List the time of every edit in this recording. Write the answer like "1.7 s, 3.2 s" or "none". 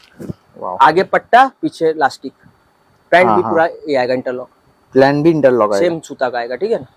none